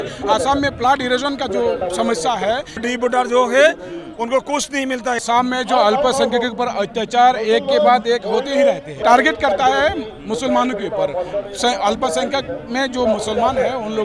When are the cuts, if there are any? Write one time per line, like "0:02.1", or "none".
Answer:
0:02.8
0:05.2
0:09.0